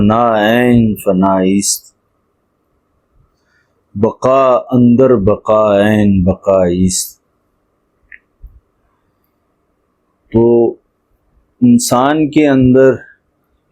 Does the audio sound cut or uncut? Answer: uncut